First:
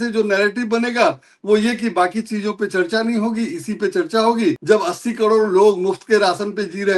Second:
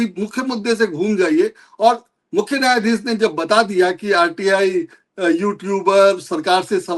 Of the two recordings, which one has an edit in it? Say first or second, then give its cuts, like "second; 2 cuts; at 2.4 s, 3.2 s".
first; 1 cut; at 4.6 s